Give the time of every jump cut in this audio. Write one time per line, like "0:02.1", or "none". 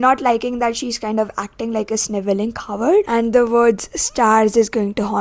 0:03.1